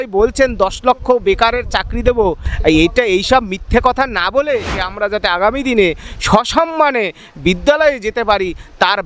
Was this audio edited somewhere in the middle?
yes; 2 cuts; at 2.5 s, 4.8 s

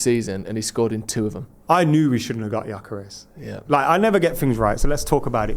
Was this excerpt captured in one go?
no; 1 cut; at 1.5 s

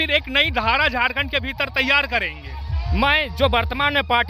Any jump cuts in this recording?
no; 0 cuts

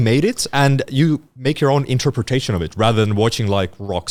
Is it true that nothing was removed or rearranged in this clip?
yes; 0 cuts

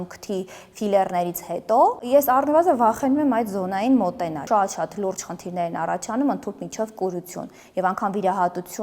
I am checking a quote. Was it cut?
yes; 1 cut; at 4.4 s

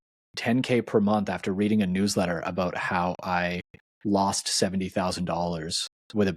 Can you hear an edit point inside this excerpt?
no; 0 cuts

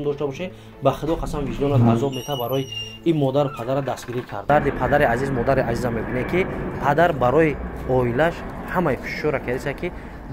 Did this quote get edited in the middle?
yes; 1 cut; at 4.5 s

